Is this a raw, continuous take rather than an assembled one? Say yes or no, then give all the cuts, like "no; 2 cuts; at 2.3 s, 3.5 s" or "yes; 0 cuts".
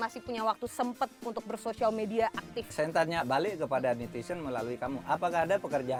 yes; 0 cuts